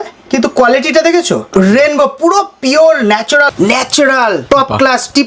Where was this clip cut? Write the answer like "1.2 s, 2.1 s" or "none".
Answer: 1.4 s, 3.5 s, 4.4 s